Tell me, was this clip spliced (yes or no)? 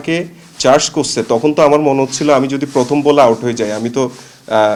no